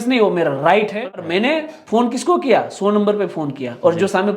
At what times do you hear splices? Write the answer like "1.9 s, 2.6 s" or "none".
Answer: 1.1 s